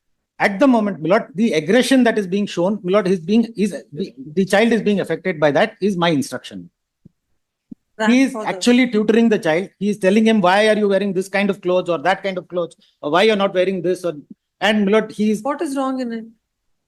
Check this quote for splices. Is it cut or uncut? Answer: uncut